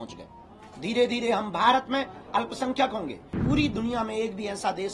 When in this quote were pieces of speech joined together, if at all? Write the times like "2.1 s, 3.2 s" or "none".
3.4 s